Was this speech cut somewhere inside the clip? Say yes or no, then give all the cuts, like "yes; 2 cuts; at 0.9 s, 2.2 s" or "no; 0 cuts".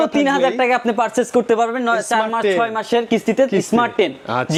no; 0 cuts